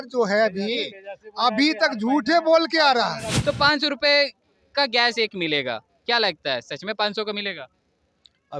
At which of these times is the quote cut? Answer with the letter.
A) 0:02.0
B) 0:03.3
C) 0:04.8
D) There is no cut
B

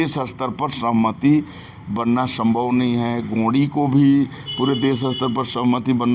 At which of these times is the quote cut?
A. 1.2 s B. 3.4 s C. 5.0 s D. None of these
D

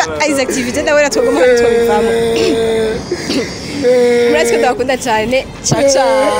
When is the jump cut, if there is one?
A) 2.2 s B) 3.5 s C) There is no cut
C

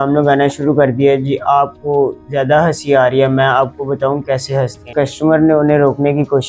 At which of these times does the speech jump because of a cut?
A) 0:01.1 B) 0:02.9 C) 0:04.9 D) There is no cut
C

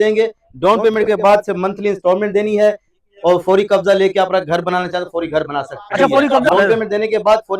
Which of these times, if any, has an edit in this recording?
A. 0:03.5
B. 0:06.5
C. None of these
B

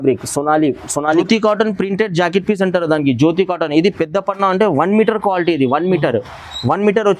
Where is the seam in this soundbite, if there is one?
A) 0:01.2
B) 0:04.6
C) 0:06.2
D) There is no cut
A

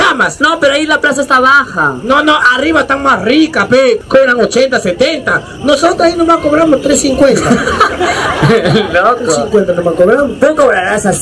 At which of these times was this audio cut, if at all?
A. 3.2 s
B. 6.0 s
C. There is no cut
C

